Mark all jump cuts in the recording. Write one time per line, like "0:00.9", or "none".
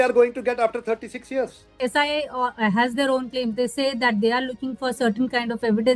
0:01.7

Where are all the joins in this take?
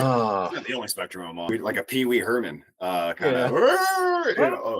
0:01.5

